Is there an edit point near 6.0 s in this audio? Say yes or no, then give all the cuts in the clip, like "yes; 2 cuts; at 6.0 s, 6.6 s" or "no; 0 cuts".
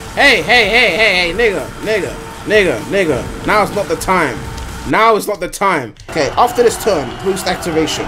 yes; 1 cut; at 6.0 s